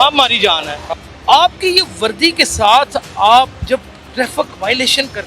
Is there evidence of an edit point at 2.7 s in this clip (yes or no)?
no